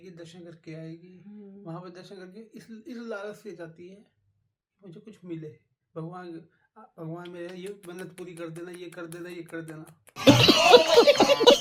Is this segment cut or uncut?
uncut